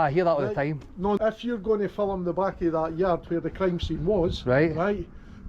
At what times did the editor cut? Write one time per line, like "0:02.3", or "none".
0:01.2